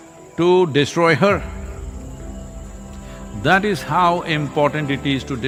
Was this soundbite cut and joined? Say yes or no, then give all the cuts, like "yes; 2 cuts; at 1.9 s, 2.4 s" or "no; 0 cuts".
no; 0 cuts